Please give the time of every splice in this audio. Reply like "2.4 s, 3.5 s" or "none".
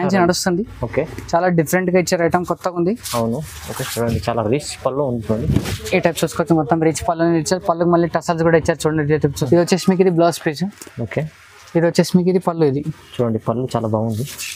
9.4 s